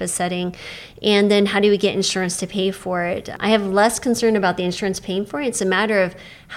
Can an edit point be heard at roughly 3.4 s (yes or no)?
yes